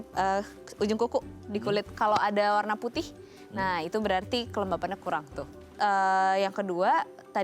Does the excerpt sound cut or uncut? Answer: cut